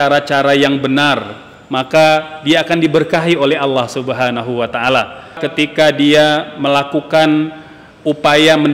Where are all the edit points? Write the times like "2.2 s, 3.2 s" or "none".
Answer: 5.4 s